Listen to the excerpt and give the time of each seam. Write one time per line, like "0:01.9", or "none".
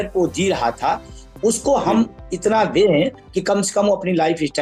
none